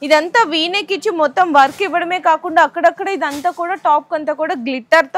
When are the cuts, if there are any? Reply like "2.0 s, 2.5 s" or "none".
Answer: none